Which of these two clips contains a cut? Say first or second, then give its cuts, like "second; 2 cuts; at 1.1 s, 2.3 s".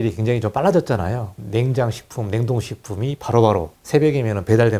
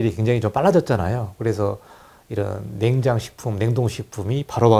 first; 2 cuts; at 1.3 s, 3.8 s